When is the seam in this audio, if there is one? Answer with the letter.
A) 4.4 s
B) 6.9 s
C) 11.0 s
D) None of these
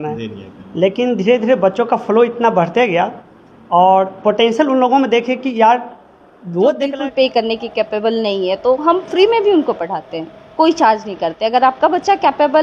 B